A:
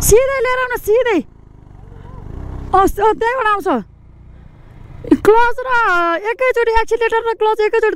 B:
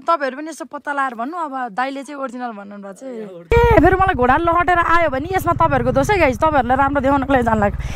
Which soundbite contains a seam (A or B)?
B